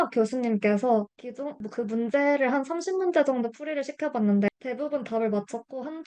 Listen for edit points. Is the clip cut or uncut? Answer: cut